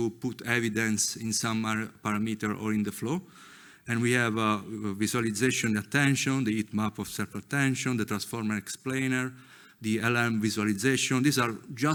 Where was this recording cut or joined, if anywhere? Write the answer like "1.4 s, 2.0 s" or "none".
none